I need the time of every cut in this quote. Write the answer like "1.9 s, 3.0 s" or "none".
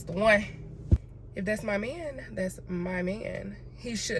1.0 s